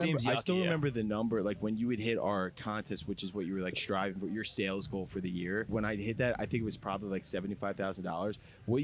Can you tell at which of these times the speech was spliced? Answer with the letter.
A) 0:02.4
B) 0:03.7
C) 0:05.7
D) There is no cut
C